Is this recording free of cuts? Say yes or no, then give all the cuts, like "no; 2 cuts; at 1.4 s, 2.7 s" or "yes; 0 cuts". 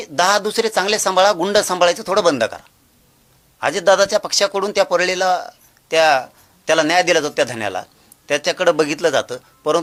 yes; 0 cuts